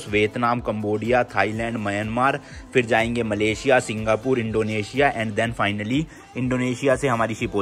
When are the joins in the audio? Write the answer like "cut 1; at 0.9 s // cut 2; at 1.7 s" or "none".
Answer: none